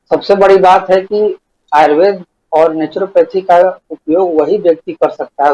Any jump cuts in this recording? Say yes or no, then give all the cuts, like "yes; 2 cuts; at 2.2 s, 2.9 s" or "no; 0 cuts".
yes; 2 cuts; at 1.5 s, 2.3 s